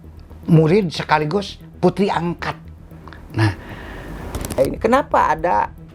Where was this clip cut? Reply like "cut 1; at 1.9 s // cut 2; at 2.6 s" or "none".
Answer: cut 1; at 4.6 s

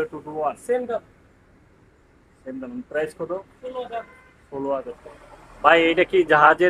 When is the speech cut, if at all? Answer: none

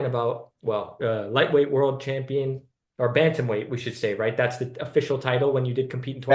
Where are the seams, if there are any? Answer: cut 1; at 1.0 s

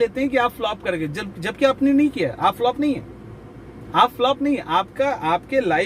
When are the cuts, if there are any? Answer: none

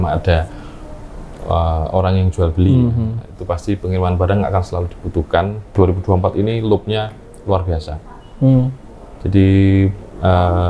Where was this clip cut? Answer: cut 1; at 5.7 s

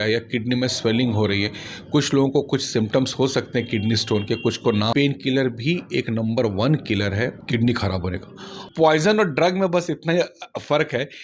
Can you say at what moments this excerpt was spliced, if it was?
cut 1; at 4.9 s // cut 2; at 8.5 s

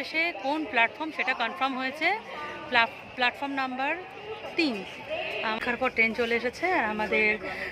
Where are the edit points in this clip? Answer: cut 1; at 5.6 s

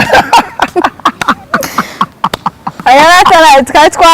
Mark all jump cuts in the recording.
cut 1; at 2.8 s

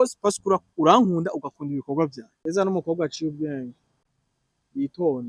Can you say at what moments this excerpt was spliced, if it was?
cut 1; at 2.3 s

